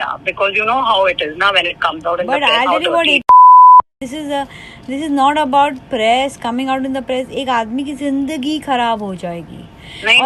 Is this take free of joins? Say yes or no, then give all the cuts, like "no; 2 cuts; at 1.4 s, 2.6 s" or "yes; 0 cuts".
yes; 0 cuts